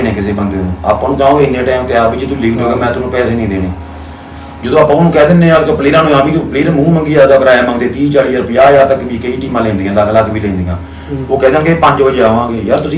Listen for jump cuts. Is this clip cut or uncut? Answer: uncut